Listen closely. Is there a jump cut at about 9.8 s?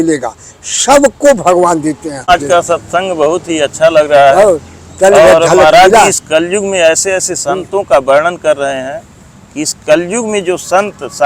no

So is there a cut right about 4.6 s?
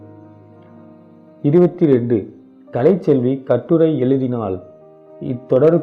no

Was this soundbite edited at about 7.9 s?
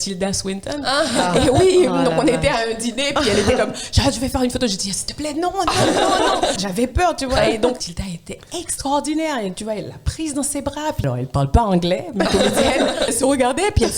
yes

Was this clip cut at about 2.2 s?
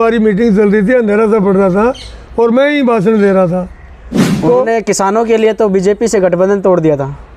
no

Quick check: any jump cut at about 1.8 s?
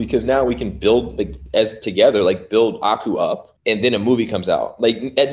no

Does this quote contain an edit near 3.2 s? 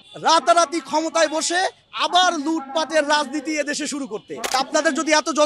no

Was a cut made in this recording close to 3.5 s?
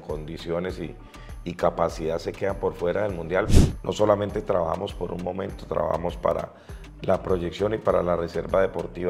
yes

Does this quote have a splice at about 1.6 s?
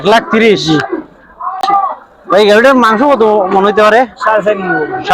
yes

